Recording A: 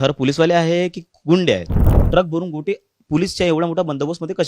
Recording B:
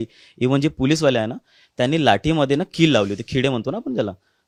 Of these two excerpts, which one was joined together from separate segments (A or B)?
A